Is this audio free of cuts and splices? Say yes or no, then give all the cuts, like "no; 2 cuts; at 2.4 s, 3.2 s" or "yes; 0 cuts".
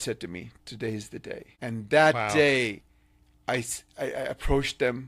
no; 1 cut; at 1.5 s